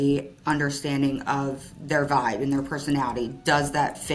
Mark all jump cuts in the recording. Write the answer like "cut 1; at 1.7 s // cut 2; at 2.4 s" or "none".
none